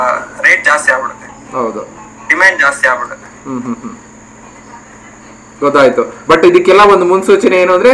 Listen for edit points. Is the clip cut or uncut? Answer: uncut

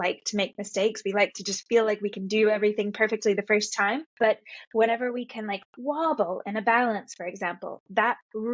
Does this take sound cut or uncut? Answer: cut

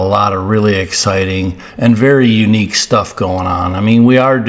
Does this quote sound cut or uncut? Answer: uncut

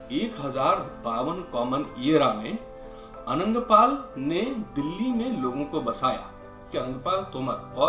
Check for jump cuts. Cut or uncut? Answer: cut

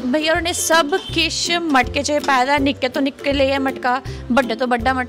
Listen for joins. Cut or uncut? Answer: uncut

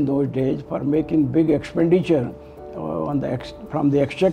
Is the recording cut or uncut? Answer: uncut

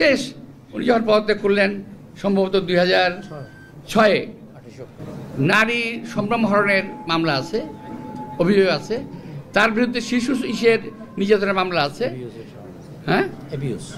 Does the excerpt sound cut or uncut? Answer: cut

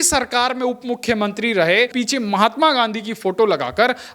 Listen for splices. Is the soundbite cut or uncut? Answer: cut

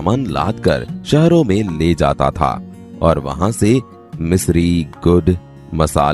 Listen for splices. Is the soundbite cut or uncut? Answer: cut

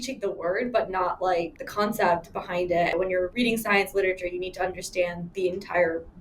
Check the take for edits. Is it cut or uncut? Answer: cut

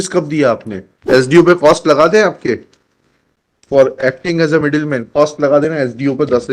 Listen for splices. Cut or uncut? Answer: cut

